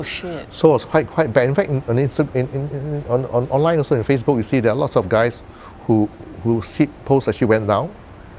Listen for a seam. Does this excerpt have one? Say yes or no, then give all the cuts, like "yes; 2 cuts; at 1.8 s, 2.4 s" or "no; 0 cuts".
no; 0 cuts